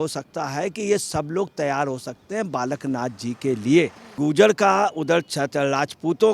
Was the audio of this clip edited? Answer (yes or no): yes